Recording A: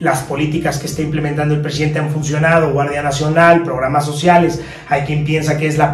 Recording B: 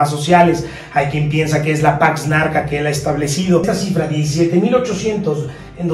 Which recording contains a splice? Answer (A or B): B